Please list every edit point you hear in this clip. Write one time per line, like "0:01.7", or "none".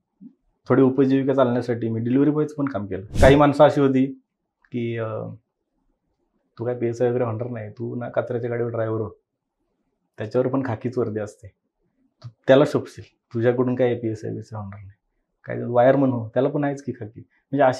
0:03.1